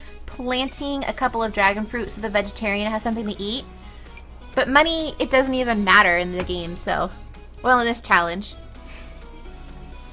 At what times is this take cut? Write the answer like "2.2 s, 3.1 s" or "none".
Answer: 2.8 s

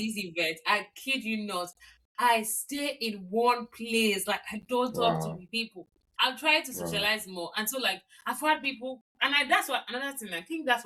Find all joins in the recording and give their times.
none

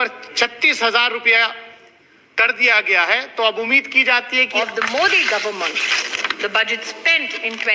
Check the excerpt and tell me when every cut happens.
4.5 s

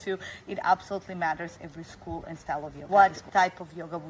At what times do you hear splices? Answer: 2.8 s

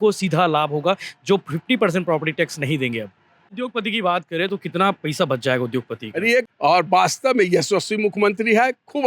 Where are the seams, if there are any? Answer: 3.5 s, 6.5 s

